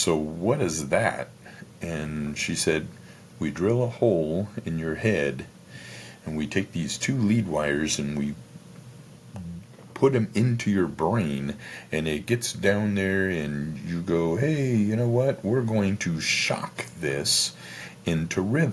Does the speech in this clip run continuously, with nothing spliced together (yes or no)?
yes